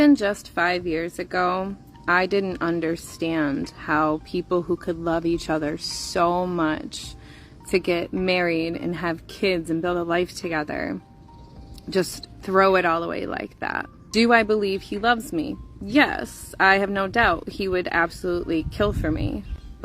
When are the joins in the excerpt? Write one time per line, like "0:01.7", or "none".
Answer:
0:13.9